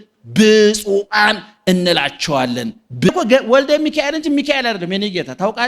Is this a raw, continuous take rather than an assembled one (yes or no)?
no